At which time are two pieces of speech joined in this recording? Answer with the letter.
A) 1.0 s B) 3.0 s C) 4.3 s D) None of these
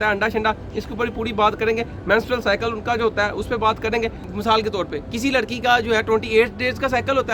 C